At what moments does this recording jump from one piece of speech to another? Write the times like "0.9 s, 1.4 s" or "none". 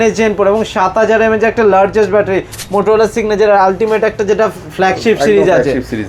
2.6 s